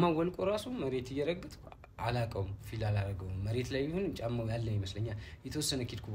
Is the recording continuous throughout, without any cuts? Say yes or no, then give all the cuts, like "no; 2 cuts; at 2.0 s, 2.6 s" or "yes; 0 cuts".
yes; 0 cuts